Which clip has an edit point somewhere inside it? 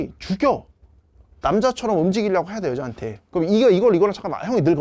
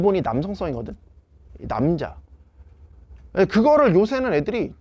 first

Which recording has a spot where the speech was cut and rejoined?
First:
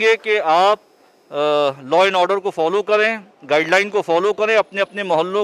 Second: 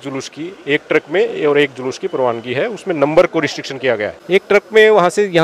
second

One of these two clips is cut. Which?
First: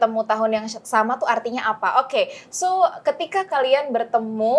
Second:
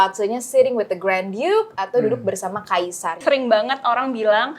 second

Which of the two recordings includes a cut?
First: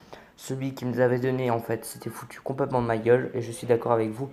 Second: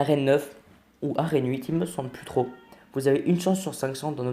second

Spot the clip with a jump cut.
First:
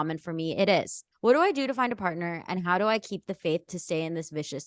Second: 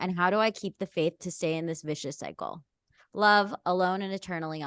first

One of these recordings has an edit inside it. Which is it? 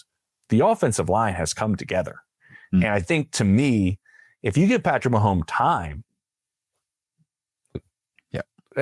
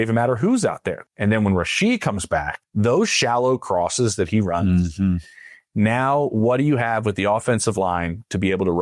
second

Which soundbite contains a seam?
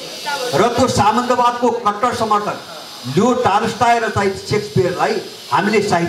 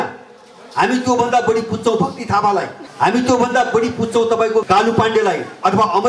second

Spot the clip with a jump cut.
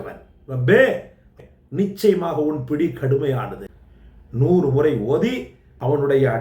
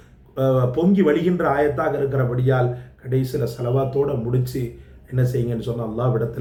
first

